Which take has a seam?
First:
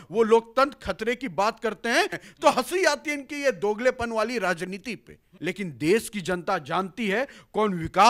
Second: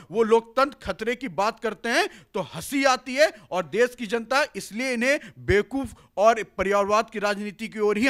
first; 2 cuts; at 2.2 s, 5.3 s

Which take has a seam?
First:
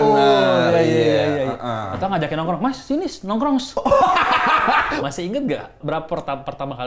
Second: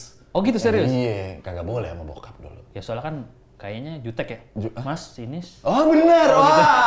first; 2 cuts; at 4.9 s, 5.8 s

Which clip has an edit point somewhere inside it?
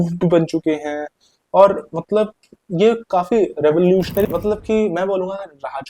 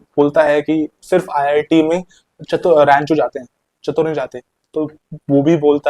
first; 1 cut; at 4.2 s

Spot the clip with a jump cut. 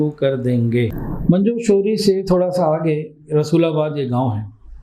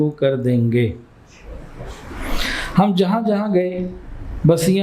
first; 1 cut; at 1.1 s

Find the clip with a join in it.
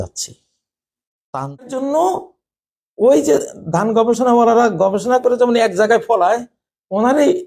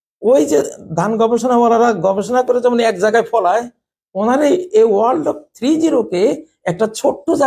first; 1 cut; at 1.7 s

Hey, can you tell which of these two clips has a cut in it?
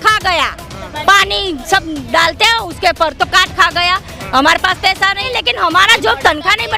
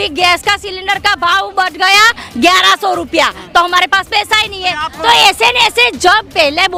first; 1 cut; at 5.2 s

